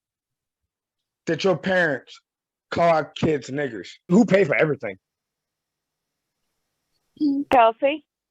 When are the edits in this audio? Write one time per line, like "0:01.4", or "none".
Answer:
0:04.1

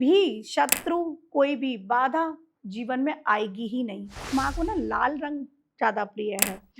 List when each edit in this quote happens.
0:04.1

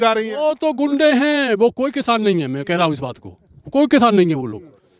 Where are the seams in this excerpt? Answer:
none

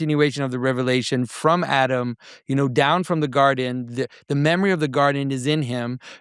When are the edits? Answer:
none

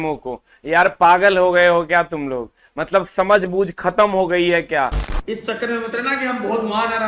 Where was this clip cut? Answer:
0:05.0

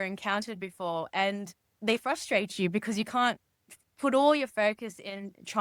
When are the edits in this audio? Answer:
none

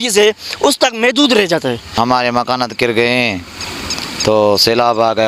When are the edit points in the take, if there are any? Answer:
0:01.9

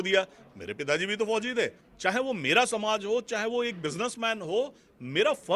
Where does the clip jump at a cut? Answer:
0:01.8

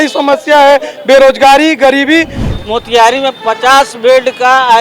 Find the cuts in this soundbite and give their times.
0:02.4

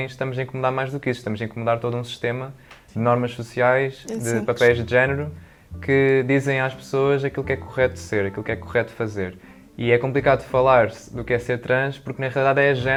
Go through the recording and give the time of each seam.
none

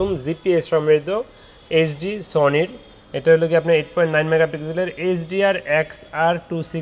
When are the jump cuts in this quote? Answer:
none

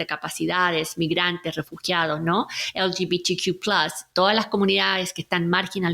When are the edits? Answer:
none

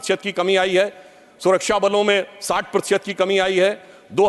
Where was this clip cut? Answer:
none

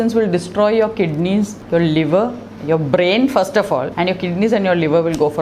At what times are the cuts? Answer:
0:01.6
0:03.9

